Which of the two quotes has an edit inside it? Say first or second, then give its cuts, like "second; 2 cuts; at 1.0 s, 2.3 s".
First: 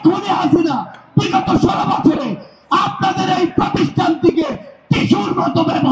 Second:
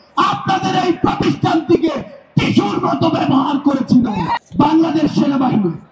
second; 1 cut; at 4.4 s